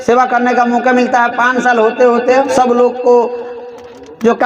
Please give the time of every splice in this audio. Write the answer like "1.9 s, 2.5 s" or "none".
2.5 s